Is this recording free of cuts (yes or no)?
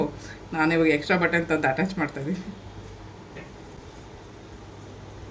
yes